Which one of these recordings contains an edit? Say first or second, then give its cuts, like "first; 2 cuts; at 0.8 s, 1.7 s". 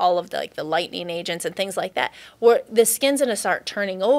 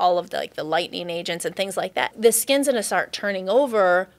second; 1 cut; at 2.1 s